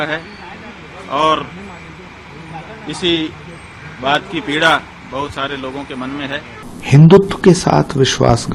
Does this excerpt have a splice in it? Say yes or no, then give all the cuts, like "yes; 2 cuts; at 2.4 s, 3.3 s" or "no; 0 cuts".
yes; 1 cut; at 6.6 s